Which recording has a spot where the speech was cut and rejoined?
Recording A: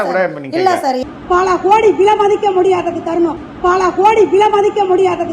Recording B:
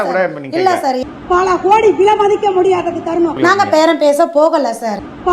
A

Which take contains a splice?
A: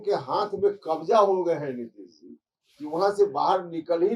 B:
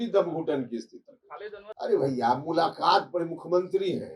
B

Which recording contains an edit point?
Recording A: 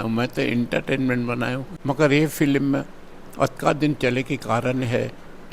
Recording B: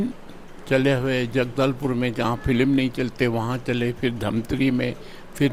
A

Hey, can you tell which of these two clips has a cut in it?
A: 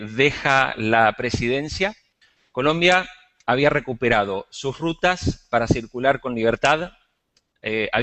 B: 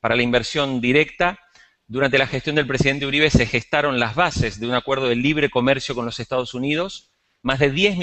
B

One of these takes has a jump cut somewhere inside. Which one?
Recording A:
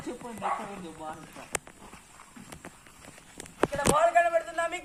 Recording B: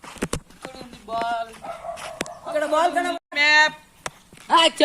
B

